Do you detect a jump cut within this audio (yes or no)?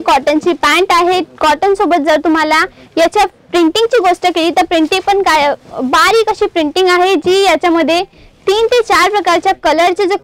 no